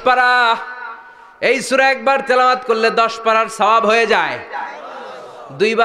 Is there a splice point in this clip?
no; 0 cuts

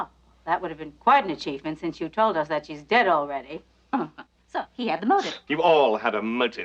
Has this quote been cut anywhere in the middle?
yes; 1 cut; at 5.6 s

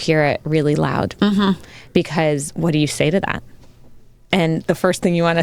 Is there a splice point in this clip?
no; 0 cuts

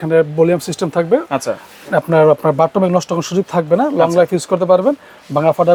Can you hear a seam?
no; 0 cuts

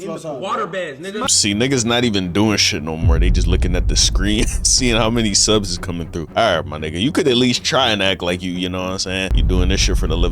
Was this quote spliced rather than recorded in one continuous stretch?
yes; 2 cuts; at 6.3 s, 9.4 s

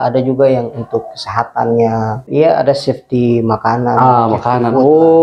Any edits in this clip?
yes; 1 cut; at 2.3 s

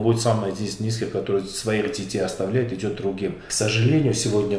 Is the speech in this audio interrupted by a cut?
yes; 1 cut; at 3.4 s

